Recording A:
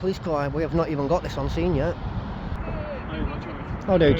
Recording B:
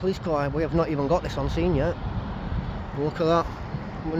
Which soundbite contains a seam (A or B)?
A